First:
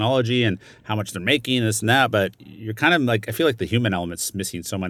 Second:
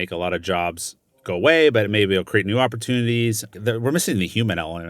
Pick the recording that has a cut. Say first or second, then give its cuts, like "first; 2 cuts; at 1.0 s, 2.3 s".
second; 1 cut; at 3.5 s